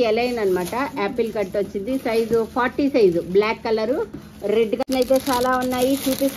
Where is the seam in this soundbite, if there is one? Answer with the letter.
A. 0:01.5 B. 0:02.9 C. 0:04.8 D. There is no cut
C